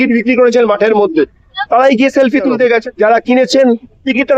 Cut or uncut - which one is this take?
cut